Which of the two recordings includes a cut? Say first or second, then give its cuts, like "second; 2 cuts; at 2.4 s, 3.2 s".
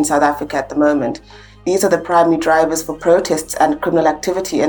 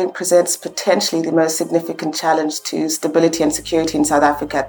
first; 1 cut; at 1.6 s